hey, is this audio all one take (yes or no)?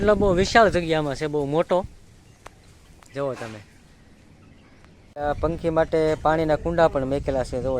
no